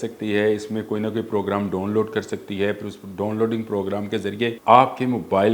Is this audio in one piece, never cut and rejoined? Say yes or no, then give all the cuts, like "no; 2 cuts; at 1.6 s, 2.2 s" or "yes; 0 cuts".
no; 1 cut; at 4.6 s